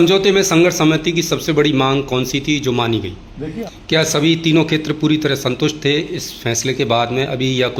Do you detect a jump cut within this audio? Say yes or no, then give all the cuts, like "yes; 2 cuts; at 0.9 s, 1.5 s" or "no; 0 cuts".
yes; 1 cut; at 3.6 s